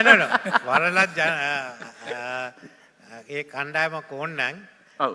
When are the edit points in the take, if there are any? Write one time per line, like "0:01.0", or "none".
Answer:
none

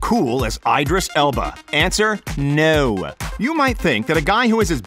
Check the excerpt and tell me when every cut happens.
0:03.2

